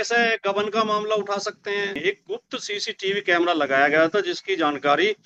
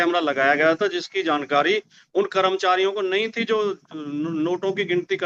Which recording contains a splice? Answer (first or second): first